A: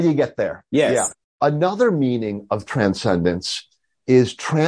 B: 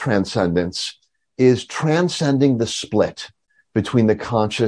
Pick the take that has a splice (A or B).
A